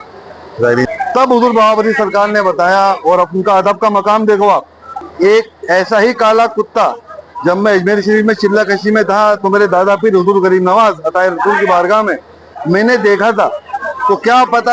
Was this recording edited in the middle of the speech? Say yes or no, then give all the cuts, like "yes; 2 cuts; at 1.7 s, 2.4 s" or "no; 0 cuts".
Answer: yes; 2 cuts; at 0.9 s, 5.1 s